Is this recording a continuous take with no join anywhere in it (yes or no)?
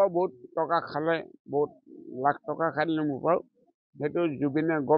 yes